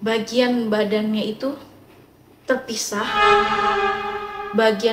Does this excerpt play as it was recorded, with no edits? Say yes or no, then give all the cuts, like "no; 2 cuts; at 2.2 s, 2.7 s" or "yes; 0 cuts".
yes; 0 cuts